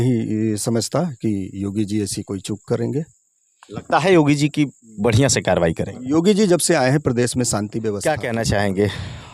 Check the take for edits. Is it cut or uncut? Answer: cut